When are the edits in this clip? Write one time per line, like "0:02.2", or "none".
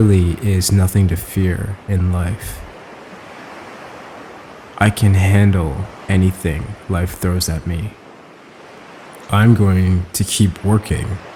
none